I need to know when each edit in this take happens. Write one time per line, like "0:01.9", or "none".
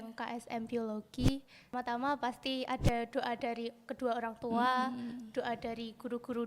0:01.7